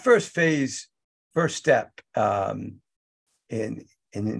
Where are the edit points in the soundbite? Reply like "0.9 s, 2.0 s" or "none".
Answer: none